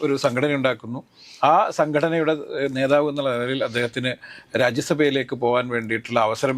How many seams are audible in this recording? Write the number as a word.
zero